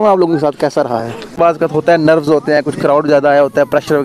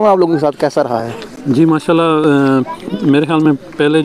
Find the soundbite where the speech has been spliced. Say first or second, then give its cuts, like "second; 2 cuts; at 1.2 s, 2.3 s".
first; 1 cut; at 1.4 s